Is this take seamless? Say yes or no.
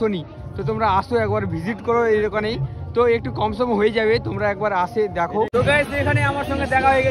no